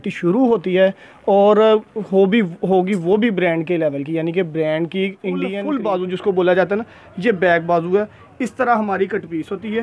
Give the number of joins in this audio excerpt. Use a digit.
1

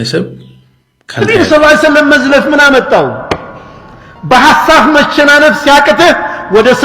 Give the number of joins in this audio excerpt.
1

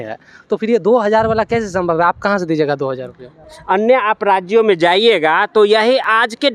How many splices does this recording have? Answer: 1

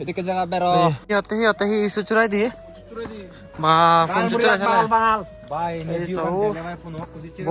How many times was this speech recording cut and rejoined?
1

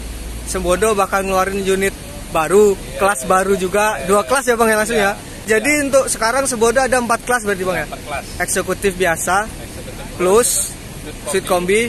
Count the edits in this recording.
1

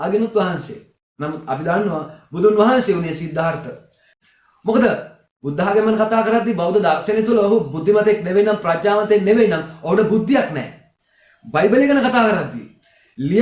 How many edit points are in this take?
1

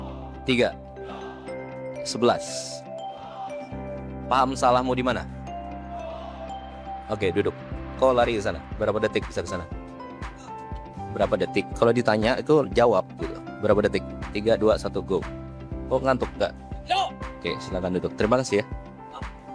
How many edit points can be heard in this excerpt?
2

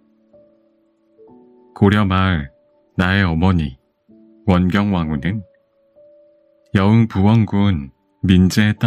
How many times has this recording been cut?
1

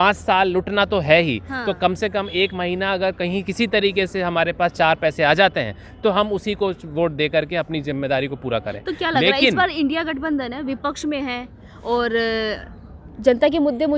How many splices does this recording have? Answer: 0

